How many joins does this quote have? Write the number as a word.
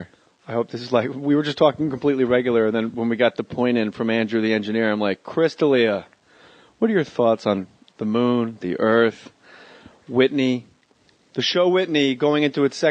one